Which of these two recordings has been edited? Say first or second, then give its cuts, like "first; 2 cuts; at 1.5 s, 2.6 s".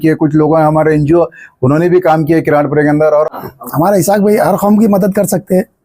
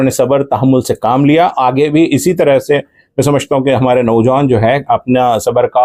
first; 1 cut; at 3.3 s